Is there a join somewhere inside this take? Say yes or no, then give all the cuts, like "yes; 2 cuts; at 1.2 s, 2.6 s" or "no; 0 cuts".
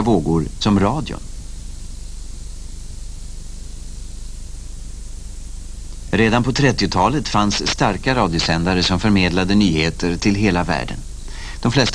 yes; 1 cut; at 1.9 s